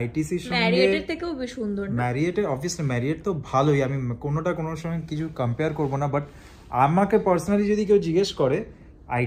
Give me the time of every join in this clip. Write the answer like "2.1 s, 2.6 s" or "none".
none